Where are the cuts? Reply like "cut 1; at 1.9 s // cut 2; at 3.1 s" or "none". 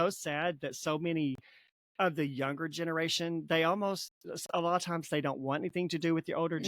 none